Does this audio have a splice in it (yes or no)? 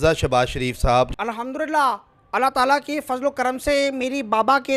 yes